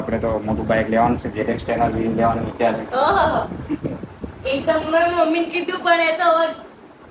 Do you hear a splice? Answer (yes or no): no